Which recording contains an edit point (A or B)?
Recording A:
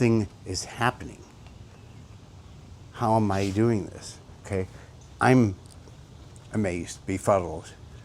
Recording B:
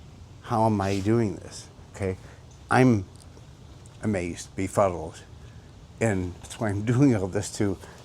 B